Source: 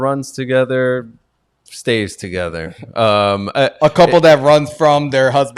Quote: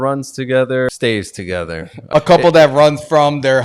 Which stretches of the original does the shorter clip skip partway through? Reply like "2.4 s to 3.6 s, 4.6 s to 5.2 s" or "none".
0.9 s to 1.7 s, 2.9 s to 3.8 s